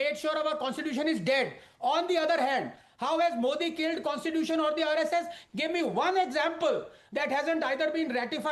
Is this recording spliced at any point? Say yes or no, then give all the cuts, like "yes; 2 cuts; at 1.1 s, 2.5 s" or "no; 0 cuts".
no; 0 cuts